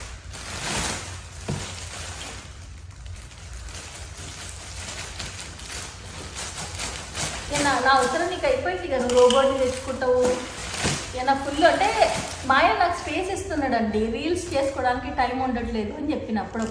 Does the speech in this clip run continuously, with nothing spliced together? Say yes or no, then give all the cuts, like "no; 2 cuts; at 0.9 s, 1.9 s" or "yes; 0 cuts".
yes; 0 cuts